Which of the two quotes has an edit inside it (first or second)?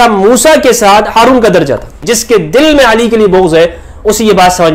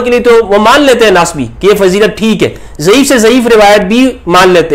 first